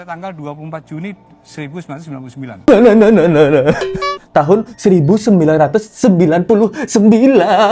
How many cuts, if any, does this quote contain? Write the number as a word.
one